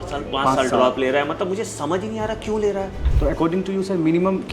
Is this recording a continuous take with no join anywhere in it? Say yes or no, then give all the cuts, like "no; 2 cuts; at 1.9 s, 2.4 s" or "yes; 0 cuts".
no; 1 cut; at 3.0 s